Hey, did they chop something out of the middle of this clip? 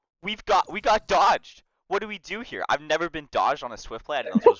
no; 0 cuts

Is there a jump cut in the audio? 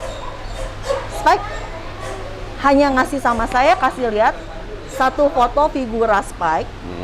no; 0 cuts

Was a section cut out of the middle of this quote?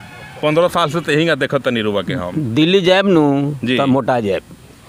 no; 0 cuts

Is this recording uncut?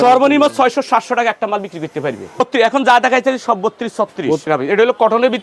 no; 2 cuts; at 2.4 s, 4.5 s

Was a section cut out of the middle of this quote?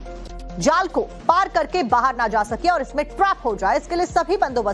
no; 0 cuts

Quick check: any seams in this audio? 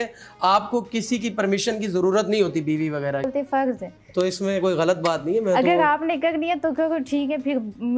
yes; 1 cut; at 3.3 s

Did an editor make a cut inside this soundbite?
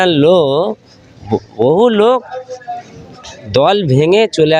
no; 0 cuts

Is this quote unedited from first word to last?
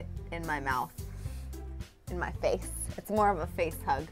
yes; 0 cuts

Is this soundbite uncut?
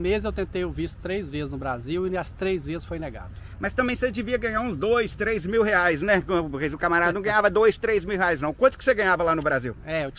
yes; 0 cuts

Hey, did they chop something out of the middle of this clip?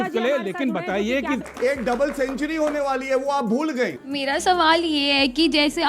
yes; 2 cuts; at 1.5 s, 4.0 s

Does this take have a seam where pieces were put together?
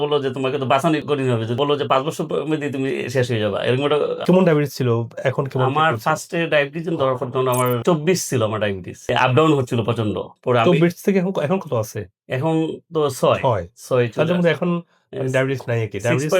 yes; 4 cuts; at 1.6 s, 4.2 s, 8.9 s, 10.3 s

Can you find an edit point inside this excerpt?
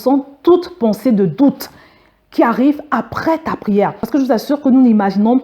yes; 1 cut; at 4.0 s

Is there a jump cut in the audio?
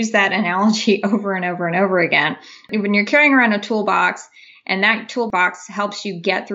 yes; 2 cuts; at 2.7 s, 5.3 s

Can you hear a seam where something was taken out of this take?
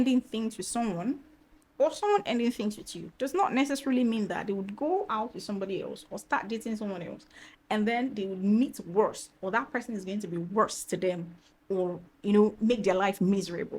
no; 0 cuts

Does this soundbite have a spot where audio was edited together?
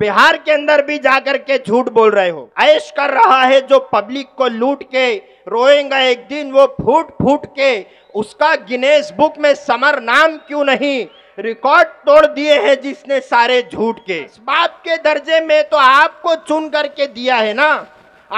yes; 2 cuts; at 2.4 s, 14.4 s

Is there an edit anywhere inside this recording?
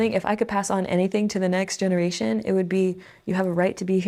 no; 0 cuts

